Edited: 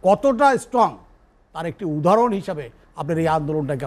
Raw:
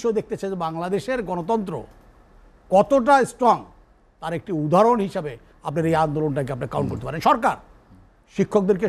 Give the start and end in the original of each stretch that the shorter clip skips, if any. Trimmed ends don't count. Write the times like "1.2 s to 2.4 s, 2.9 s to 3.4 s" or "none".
none